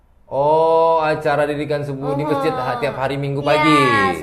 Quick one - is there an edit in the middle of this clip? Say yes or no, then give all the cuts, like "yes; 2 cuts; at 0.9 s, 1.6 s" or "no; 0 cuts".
no; 0 cuts